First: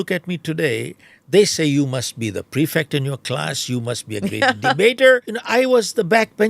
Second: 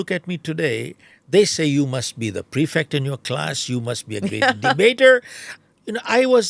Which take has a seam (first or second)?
first